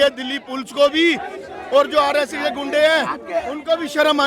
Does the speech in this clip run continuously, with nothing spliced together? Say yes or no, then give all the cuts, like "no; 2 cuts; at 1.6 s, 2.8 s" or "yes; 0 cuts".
yes; 0 cuts